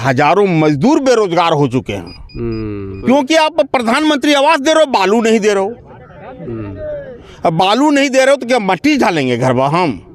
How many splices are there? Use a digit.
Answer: 1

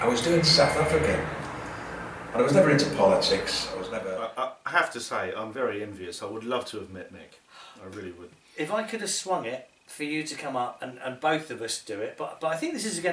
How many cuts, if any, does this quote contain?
1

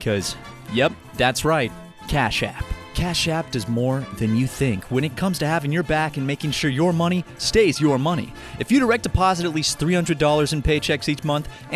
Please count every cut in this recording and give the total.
1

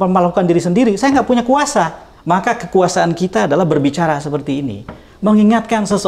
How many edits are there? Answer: 1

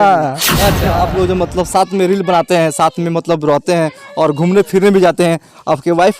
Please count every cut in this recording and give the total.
1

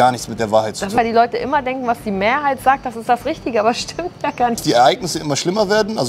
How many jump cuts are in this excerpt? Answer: 2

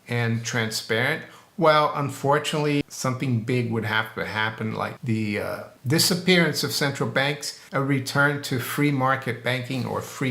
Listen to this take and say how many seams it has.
4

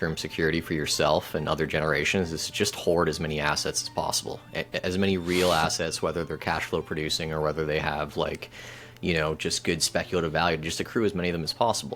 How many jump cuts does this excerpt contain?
0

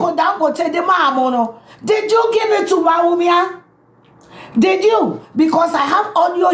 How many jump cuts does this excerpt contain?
0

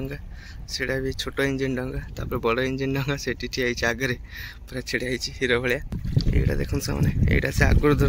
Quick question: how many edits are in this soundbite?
1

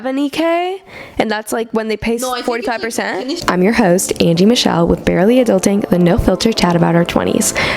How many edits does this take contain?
1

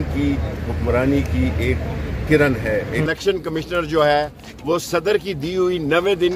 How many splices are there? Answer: 1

